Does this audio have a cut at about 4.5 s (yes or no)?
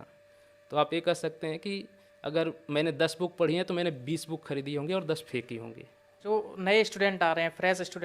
no